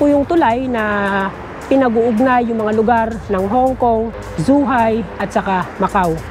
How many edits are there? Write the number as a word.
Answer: two